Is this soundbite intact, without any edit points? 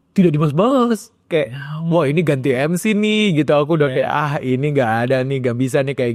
yes; 0 cuts

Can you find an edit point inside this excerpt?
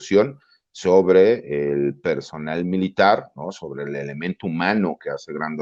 no; 0 cuts

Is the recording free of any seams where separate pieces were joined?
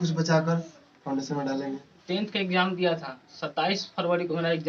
no; 1 cut; at 1.9 s

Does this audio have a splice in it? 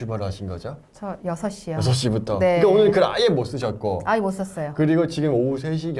no; 0 cuts

